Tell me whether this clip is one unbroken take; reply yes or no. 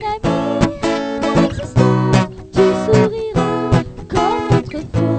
yes